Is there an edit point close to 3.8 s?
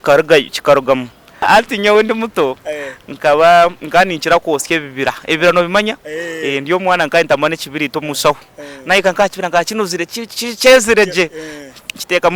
no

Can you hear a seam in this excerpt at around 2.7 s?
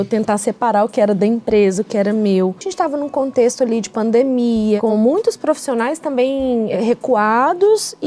yes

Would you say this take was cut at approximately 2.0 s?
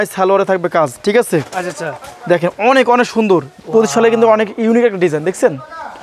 no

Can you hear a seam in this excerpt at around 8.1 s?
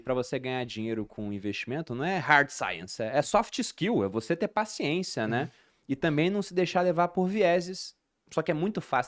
no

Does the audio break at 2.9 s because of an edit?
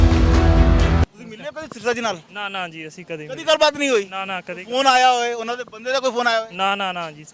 no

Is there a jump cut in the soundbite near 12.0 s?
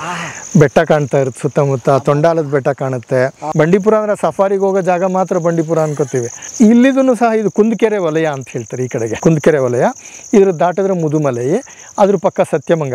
no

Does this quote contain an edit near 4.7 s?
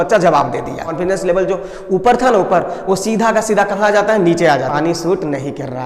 yes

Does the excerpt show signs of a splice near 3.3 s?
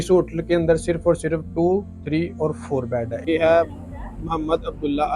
yes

